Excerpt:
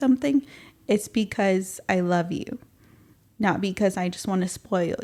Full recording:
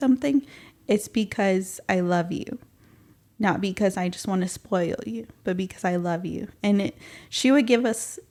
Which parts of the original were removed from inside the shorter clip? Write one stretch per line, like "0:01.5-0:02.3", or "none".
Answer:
none